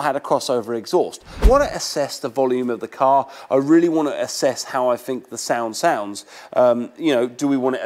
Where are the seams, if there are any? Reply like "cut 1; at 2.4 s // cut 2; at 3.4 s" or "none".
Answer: cut 1; at 1.4 s